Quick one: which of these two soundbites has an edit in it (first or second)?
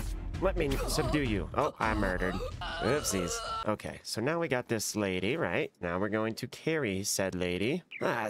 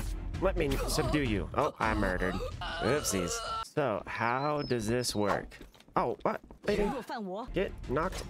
second